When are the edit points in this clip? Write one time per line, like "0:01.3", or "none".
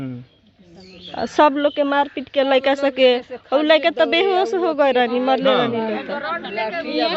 none